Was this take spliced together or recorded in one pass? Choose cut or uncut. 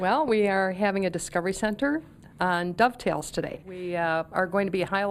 uncut